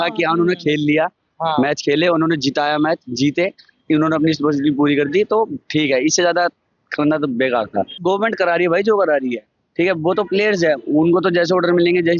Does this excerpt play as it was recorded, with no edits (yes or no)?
no